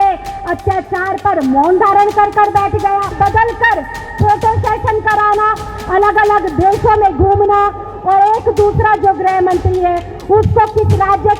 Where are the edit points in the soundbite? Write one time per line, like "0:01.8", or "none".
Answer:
0:03.1